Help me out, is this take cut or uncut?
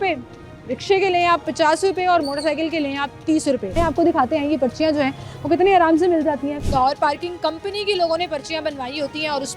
cut